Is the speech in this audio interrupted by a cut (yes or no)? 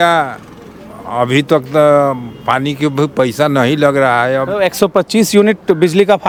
no